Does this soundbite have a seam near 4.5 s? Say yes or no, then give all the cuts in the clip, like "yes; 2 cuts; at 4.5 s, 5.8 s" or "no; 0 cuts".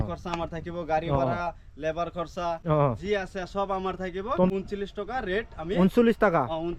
yes; 1 cut; at 4.5 s